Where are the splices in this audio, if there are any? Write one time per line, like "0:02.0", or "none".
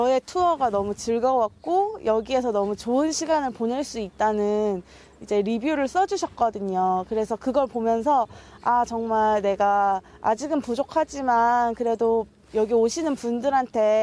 none